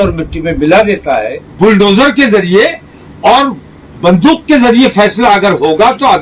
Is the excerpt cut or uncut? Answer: cut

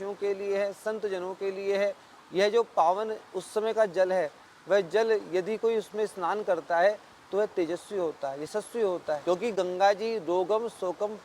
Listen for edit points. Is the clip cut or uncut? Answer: cut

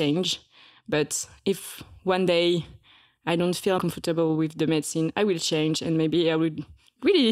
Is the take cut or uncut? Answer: cut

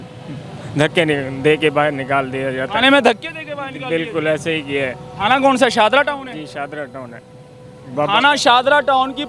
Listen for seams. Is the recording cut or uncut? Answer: uncut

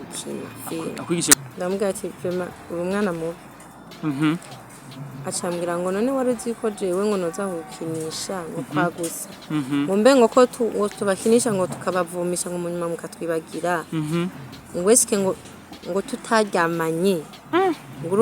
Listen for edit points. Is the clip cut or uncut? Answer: cut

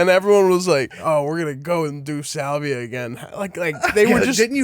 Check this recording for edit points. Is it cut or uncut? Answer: cut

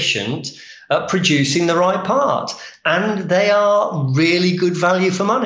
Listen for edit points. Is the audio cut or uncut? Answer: uncut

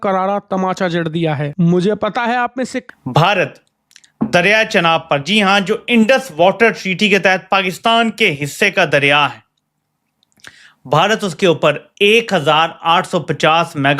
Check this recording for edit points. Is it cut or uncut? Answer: cut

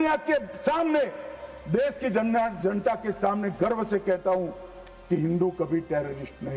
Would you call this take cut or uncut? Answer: uncut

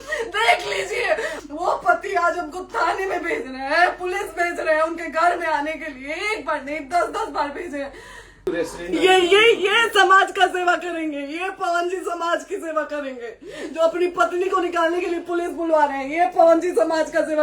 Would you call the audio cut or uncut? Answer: cut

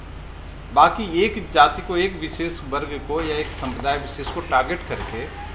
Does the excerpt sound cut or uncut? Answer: uncut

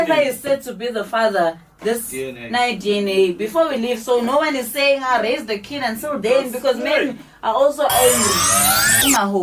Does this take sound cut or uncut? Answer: cut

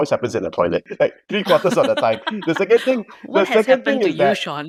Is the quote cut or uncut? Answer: uncut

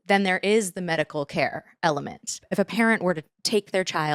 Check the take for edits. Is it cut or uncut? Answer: cut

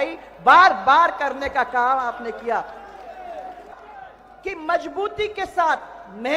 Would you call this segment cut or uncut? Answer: cut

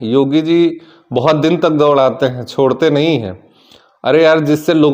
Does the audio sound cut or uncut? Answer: uncut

